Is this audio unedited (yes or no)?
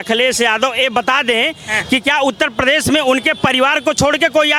yes